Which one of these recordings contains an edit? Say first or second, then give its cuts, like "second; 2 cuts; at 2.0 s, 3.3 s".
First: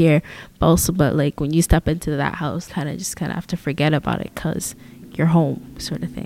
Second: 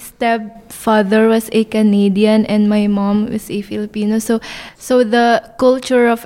first; 2 cuts; at 2.6 s, 5.1 s